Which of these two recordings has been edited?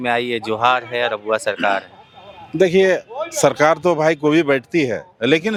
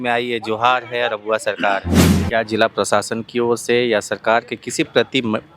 second; 1 cut; at 2.2 s

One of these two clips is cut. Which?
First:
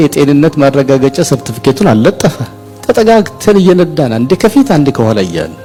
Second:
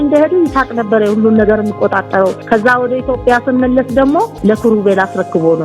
second; 2 cuts; at 2.4 s, 4.3 s

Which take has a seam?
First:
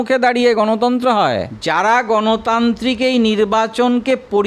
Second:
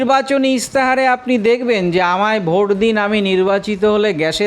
first; 1 cut; at 1.4 s

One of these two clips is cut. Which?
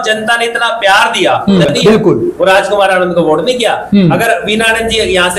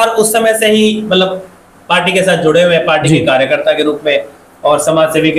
first; 1 cut; at 1.7 s

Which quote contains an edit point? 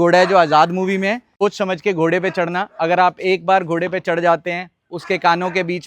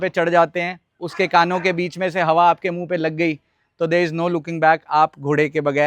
first; 1 cut; at 1.3 s

